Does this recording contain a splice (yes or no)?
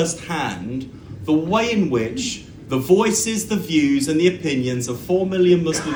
no